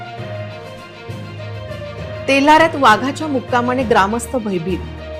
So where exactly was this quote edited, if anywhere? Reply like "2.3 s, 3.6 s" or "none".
none